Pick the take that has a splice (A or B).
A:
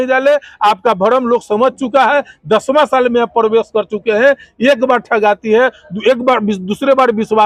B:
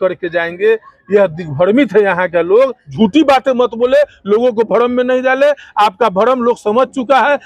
B